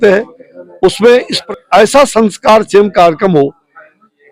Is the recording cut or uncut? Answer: cut